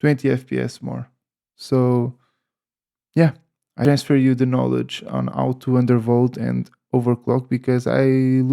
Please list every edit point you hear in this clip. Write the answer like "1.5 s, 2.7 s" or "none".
3.8 s